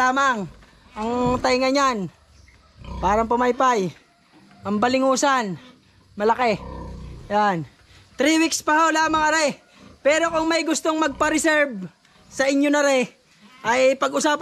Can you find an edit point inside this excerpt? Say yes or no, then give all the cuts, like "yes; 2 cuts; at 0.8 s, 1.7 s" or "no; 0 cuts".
no; 0 cuts